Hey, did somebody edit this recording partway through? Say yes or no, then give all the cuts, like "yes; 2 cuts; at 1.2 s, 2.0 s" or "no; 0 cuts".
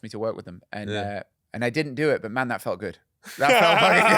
yes; 1 cut; at 1.4 s